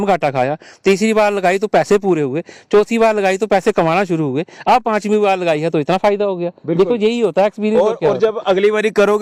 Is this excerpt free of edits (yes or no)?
yes